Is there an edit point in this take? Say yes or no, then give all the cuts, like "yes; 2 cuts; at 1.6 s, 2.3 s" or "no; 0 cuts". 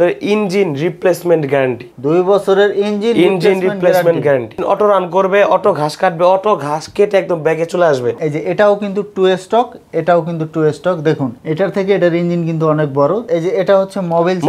yes; 3 cuts; at 4.6 s, 8.2 s, 13.2 s